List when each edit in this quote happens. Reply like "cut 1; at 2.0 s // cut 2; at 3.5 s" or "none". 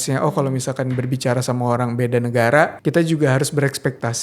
cut 1; at 2.8 s